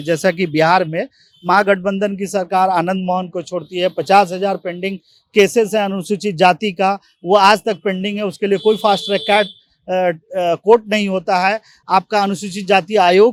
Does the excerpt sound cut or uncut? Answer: uncut